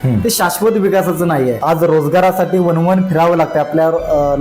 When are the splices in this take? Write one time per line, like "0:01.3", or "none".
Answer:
0:01.6